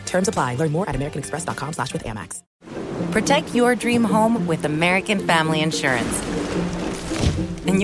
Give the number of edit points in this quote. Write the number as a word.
one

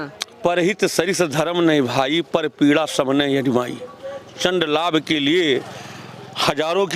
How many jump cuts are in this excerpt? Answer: zero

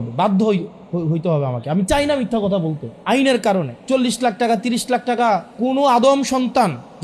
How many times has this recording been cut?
three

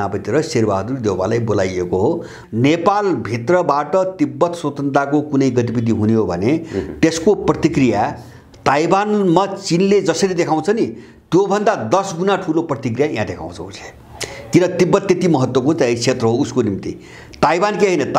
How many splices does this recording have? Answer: one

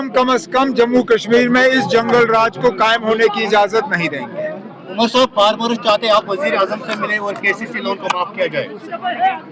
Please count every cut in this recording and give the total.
zero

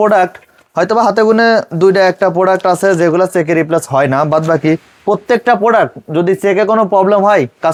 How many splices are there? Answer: zero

